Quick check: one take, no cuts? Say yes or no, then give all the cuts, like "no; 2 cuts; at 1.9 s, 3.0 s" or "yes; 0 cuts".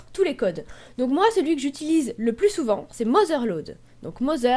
no; 1 cut; at 2.8 s